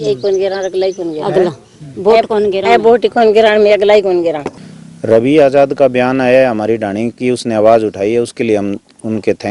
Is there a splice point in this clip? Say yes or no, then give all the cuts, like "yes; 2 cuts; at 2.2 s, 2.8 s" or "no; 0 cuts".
yes; 1 cut; at 4.5 s